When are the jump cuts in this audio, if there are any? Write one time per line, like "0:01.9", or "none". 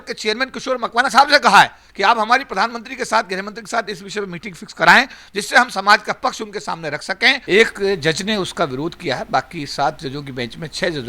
0:07.4

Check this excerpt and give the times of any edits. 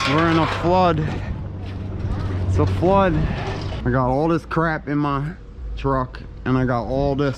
0:03.7

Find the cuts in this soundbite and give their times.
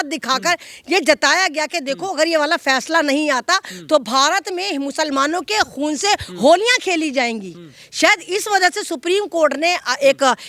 none

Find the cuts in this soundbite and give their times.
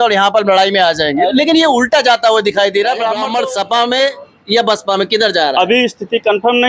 0:03.2

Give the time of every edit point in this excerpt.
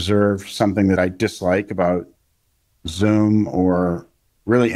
0:01.0

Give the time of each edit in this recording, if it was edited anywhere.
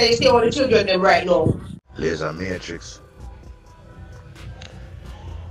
0:01.7

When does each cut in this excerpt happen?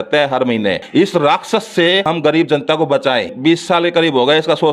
0:00.8
0:02.0
0:03.3

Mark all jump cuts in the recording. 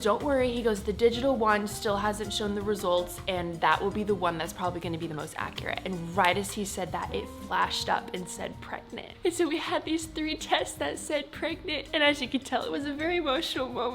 none

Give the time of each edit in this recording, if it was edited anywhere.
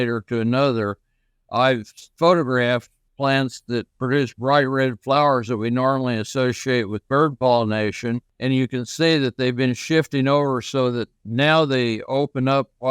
0:02.0
0:03.0
0:08.3

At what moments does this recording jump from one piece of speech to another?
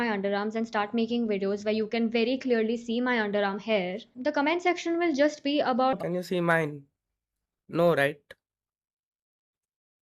none

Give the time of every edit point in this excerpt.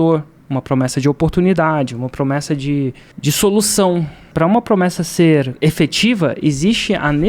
0:03.1
0:04.2
0:05.5

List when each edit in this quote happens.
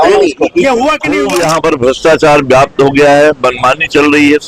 0:01.2

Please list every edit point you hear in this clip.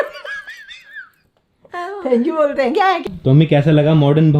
0:03.0

